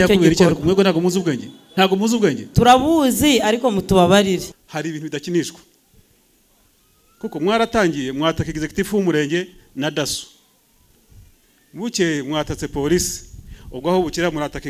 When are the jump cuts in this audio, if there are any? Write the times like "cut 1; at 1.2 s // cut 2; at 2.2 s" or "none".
cut 1; at 4.5 s